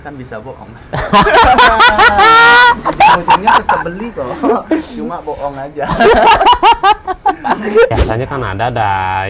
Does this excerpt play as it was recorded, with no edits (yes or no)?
no